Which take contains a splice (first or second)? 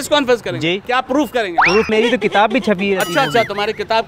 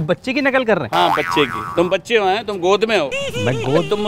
first